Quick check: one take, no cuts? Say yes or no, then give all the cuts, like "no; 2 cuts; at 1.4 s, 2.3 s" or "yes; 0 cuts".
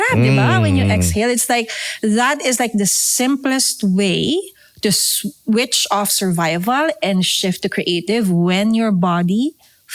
yes; 0 cuts